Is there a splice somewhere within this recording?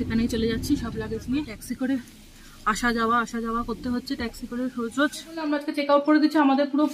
yes; 2 cuts; at 1.6 s, 5.6 s

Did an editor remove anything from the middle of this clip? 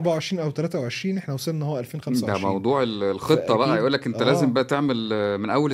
no; 0 cuts

